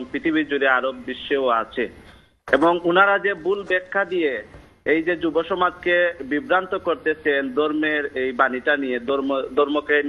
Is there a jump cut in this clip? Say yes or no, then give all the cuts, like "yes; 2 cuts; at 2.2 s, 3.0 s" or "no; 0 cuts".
no; 0 cuts